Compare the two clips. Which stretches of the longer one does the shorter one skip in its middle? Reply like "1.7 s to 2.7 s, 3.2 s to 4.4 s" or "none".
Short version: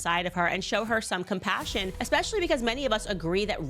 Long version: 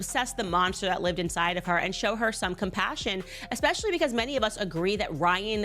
3.3 s to 3.5 s

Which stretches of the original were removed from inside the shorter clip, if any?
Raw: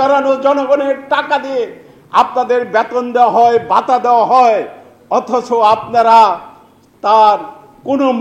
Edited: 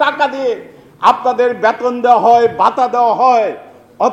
none

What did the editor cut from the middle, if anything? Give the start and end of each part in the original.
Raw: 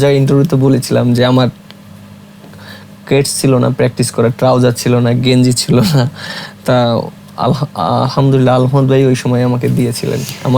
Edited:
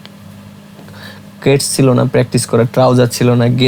none

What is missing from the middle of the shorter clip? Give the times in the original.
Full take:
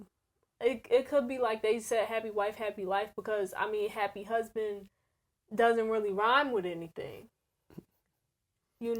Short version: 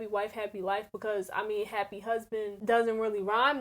4.8 s to 5.5 s

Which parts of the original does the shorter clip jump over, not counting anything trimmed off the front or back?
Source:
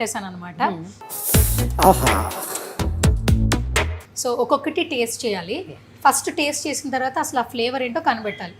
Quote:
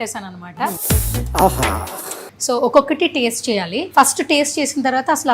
0.8 s to 1.2 s, 2.7 s to 4.0 s, 5.5 s to 5.9 s

